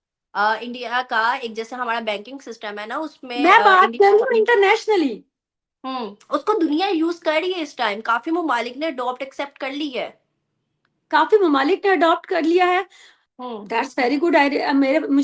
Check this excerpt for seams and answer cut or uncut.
uncut